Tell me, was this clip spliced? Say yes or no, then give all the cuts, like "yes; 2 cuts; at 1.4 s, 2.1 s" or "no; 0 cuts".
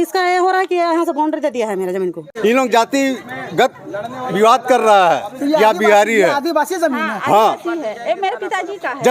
yes; 1 cut; at 2.3 s